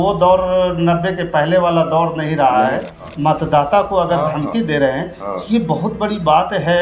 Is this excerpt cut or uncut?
cut